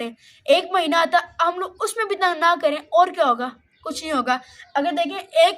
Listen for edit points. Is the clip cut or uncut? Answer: uncut